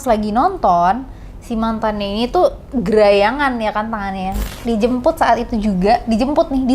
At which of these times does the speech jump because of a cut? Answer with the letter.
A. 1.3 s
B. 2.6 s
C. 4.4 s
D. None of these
C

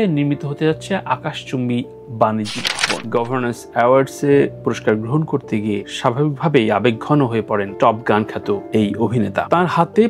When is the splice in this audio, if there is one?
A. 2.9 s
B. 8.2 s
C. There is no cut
A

